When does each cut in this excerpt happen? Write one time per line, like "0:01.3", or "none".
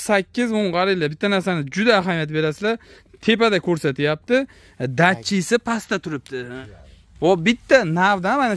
0:06.5